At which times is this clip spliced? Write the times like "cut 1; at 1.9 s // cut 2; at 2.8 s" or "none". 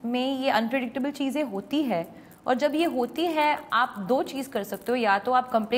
none